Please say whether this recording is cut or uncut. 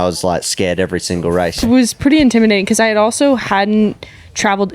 cut